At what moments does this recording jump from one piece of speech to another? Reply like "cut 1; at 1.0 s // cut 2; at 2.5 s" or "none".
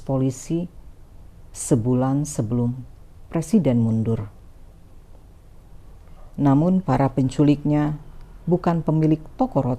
cut 1; at 5.9 s